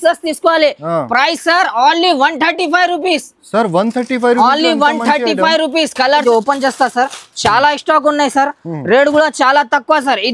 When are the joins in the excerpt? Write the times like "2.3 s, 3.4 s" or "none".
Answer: 6.2 s